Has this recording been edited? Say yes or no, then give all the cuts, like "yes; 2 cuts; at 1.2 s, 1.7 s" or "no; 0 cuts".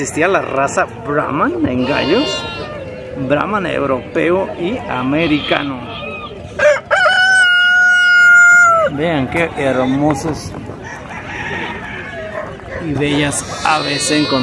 no; 0 cuts